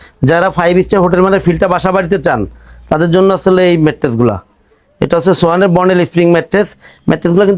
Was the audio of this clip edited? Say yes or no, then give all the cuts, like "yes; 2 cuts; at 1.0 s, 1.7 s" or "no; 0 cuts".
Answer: no; 0 cuts